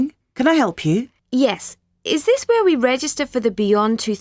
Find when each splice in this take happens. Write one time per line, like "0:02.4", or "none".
0:01.2

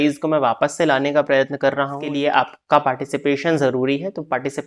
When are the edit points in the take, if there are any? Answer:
0:02.1

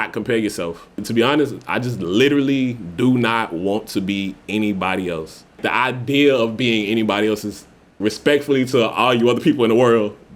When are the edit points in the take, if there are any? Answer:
0:01.0
0:05.6

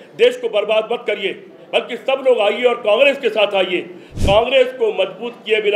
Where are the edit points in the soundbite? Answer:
0:04.1

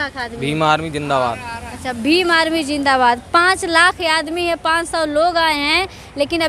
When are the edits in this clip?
none

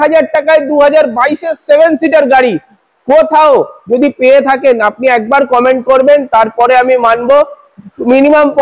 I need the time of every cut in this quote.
none

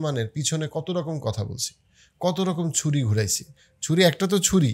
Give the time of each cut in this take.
none

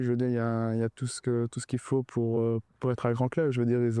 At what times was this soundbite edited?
0:02.7

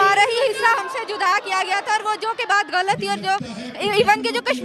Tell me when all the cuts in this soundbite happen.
none

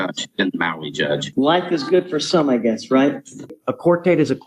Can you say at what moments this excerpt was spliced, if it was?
0:01.3
0:03.5

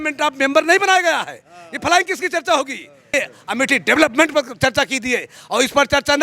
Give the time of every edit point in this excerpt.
0:03.1

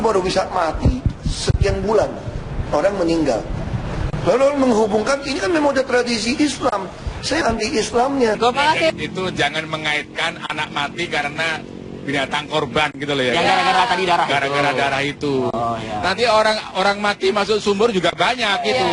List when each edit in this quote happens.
0:07.4
0:08.4

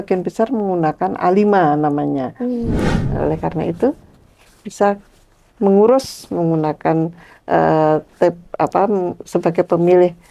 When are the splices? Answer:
0:02.8

